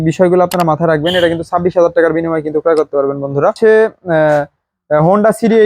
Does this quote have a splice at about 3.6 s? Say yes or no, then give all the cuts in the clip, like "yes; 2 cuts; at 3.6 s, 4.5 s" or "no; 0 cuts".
yes; 1 cut; at 3.6 s